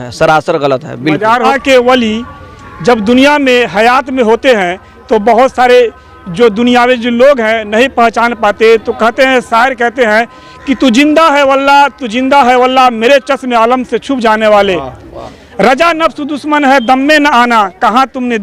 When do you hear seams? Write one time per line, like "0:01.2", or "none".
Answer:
0:01.5